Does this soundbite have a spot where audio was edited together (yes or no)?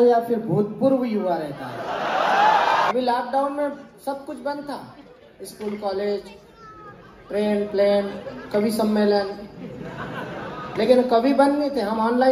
no